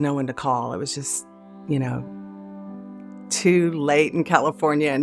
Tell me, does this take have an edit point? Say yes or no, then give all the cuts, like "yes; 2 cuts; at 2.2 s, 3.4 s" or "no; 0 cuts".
no; 0 cuts